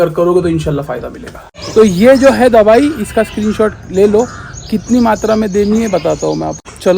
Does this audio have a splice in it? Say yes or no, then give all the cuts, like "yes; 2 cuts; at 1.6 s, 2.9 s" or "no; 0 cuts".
yes; 1 cut; at 1.5 s